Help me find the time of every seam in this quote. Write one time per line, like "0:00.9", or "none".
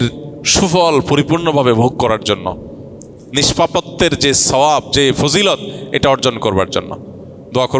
none